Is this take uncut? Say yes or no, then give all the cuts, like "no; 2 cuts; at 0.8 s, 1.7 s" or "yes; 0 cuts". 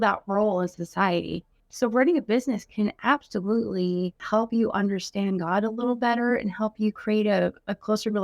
no; 2 cuts; at 1.6 s, 4.2 s